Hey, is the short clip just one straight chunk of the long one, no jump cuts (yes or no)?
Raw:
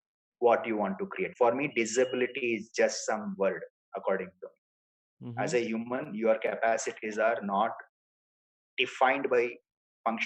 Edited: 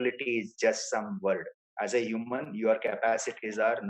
no